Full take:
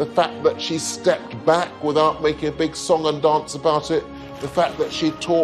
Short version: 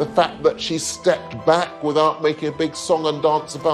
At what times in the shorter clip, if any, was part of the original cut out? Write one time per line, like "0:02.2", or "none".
none